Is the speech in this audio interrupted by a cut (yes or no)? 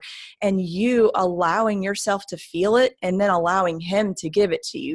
no